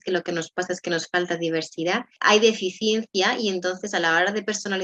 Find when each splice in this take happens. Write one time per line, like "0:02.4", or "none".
0:02.2